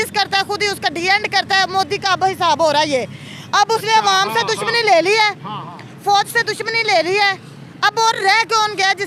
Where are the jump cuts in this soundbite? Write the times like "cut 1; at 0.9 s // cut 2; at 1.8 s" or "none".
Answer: none